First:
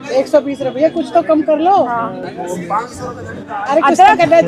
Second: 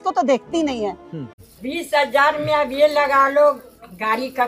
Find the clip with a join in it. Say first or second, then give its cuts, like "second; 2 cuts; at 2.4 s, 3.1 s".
second; 1 cut; at 1.2 s